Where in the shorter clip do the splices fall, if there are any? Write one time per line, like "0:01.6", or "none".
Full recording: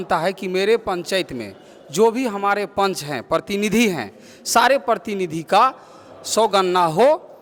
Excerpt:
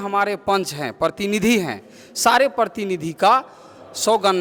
none